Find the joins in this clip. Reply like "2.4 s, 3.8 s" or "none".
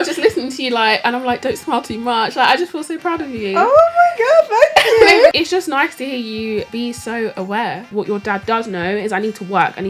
5.3 s, 6.7 s, 7.9 s